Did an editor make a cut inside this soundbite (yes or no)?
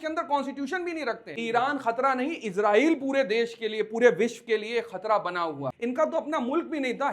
yes